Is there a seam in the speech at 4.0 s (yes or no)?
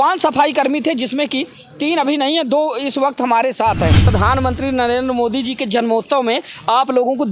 yes